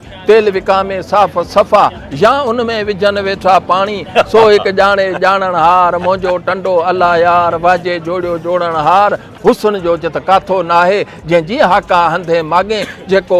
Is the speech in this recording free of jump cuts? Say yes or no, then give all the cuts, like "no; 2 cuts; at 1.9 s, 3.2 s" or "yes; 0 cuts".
no; 1 cut; at 9.3 s